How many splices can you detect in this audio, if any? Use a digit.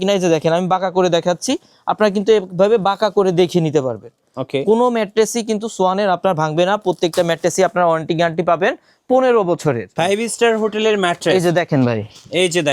1